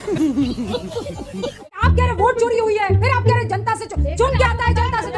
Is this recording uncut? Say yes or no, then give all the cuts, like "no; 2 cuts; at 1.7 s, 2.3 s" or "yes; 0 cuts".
no; 1 cut; at 1.7 s